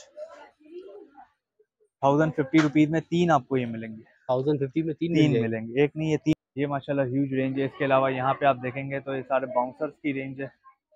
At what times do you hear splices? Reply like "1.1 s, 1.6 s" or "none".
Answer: 6.3 s